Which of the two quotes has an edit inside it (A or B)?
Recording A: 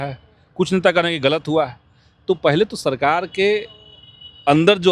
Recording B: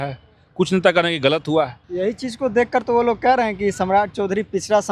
B